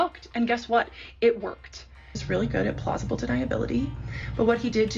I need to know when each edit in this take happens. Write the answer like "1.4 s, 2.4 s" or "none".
2.2 s